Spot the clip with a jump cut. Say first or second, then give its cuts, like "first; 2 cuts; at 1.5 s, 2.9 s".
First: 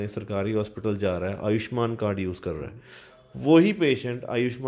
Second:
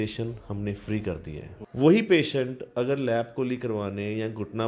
second; 1 cut; at 1.5 s